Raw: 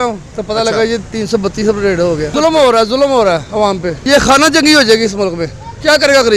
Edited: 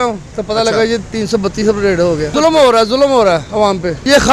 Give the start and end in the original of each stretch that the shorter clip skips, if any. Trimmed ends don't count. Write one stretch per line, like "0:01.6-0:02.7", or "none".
none